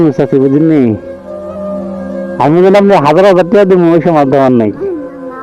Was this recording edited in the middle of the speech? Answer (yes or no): yes